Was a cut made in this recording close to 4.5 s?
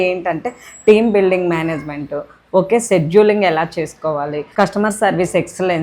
no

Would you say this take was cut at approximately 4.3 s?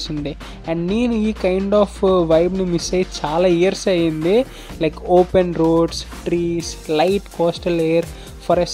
no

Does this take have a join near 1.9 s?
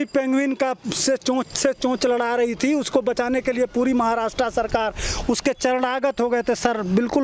no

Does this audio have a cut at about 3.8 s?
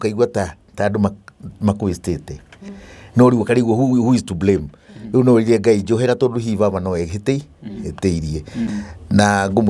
no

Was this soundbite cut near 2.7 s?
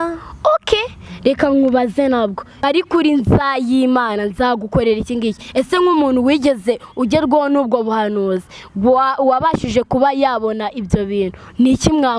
yes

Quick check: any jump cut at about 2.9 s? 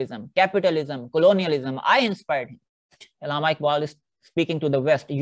yes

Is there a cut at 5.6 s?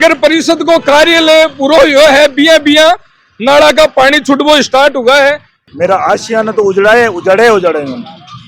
yes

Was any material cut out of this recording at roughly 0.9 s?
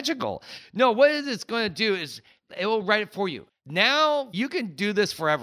no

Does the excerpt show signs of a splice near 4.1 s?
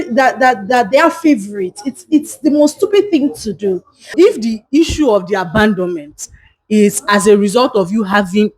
yes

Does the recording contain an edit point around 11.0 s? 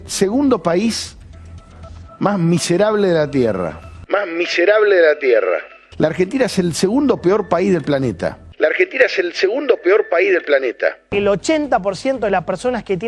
no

